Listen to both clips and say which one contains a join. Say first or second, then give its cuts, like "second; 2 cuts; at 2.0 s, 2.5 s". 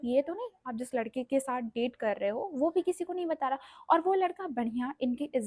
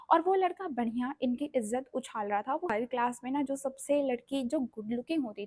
second; 1 cut; at 2.7 s